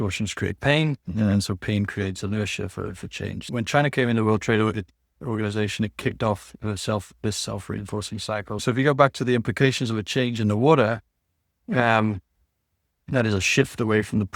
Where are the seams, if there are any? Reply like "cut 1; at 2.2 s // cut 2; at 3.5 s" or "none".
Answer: cut 1; at 3.4 s // cut 2; at 8.6 s